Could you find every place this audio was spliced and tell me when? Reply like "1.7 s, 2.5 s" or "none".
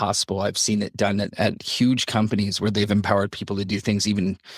1.4 s

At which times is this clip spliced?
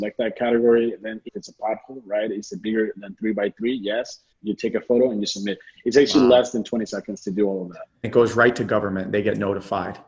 1.3 s, 4.4 s, 8.1 s

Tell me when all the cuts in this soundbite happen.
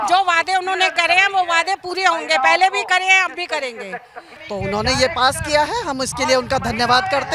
4.4 s

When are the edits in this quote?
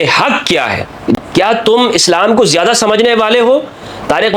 1.2 s

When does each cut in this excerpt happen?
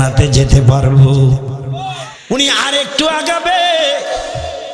2.1 s

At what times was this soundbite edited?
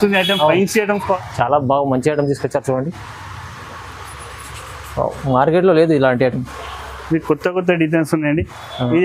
1.2 s

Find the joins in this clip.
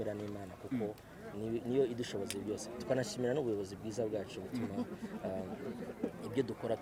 none

